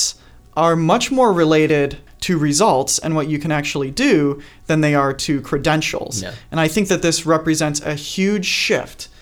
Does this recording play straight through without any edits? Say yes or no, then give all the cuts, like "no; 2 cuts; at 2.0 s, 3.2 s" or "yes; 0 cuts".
no; 1 cut; at 2.0 s